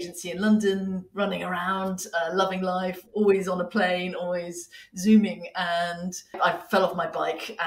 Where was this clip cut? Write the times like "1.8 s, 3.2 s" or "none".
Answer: 6.4 s